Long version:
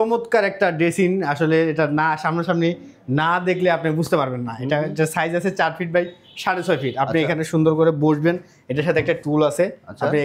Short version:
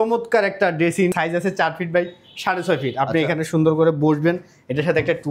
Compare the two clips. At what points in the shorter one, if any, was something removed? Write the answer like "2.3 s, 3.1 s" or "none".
1.1 s